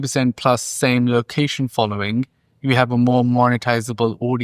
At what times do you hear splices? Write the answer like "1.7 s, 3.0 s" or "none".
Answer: none